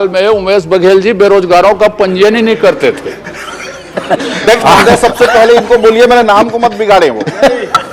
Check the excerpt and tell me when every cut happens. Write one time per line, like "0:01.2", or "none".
none